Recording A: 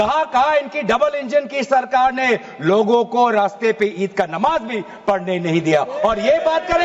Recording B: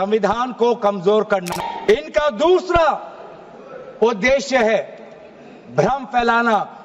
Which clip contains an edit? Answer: B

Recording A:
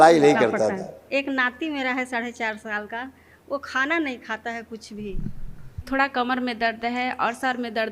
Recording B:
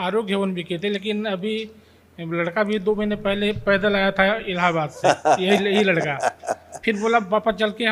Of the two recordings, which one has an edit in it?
A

